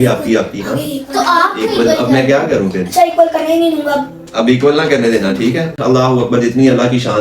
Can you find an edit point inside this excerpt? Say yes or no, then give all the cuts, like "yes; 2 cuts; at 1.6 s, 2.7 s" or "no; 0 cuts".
yes; 1 cut; at 5.7 s